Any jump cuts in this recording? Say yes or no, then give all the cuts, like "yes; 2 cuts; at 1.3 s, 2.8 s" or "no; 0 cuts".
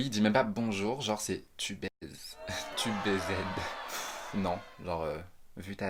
no; 0 cuts